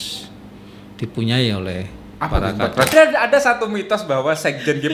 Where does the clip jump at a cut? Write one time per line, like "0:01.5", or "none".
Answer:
0:02.9